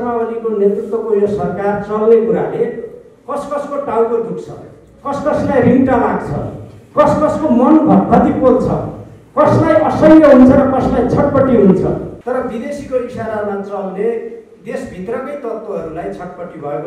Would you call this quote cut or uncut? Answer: cut